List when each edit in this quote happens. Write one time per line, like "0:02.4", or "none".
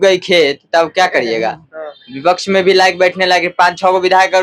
none